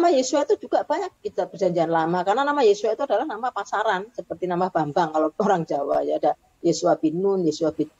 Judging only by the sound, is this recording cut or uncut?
cut